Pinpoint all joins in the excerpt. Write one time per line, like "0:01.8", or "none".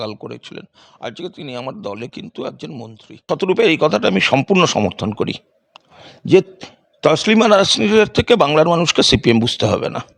0:03.3